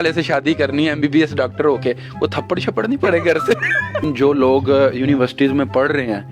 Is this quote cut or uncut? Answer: cut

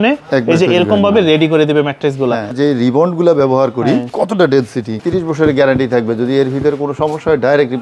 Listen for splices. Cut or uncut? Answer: cut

